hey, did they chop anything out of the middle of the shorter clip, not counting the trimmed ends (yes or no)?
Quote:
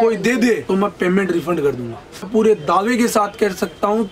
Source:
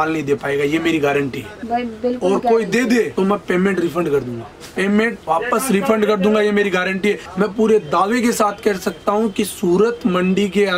yes